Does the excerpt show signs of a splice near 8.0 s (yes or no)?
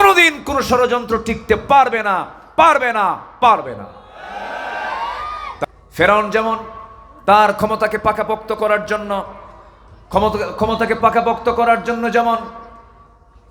no